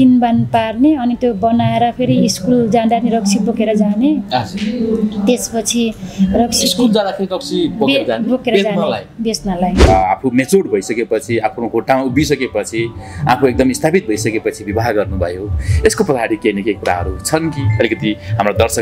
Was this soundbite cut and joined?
yes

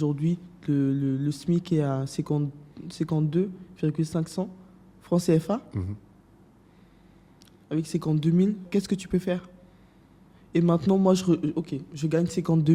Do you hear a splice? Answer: yes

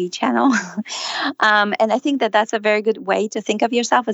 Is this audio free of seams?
yes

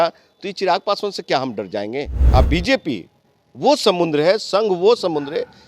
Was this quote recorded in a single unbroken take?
no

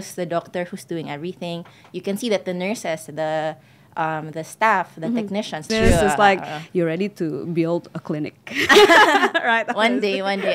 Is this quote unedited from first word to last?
no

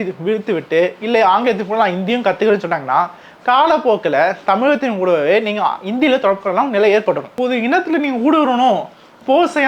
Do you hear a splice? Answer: yes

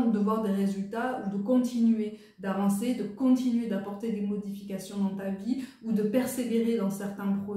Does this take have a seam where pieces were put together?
no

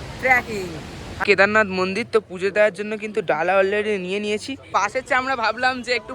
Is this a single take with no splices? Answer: no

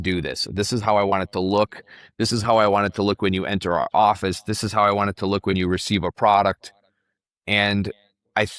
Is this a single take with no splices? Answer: yes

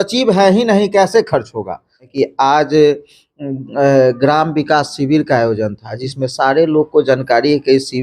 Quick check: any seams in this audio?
yes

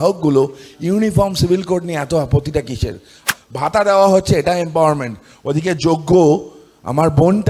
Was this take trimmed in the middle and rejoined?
yes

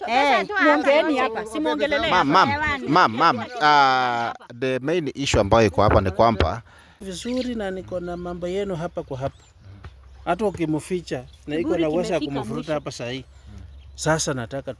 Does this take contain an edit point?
yes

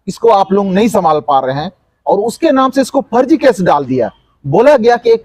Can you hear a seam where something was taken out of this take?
no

